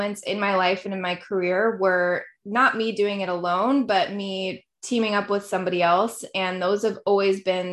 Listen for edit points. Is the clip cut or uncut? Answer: uncut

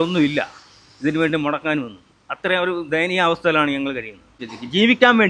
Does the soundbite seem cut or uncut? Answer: cut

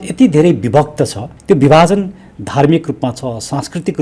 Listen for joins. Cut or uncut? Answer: cut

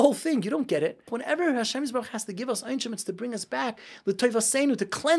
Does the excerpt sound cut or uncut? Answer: cut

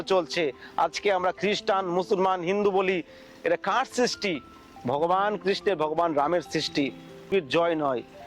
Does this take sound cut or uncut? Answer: cut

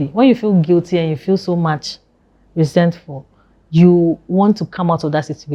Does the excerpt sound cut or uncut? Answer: uncut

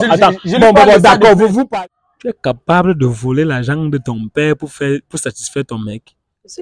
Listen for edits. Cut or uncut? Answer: cut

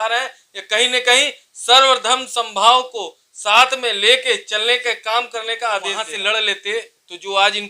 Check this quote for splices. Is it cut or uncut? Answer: cut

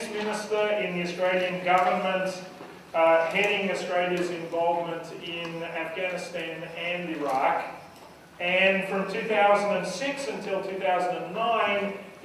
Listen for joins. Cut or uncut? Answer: cut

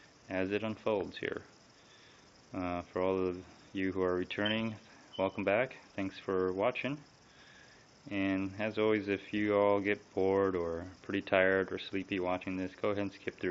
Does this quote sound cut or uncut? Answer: cut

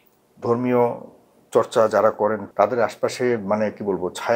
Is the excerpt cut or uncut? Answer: cut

